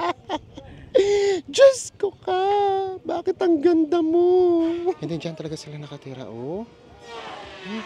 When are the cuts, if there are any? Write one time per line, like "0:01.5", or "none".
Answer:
0:05.0